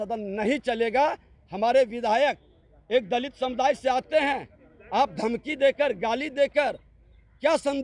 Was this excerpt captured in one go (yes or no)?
yes